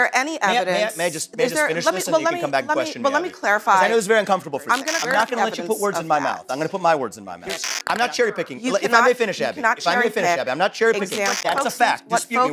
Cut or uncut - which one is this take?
cut